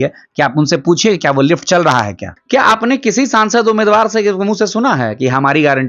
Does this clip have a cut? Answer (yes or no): yes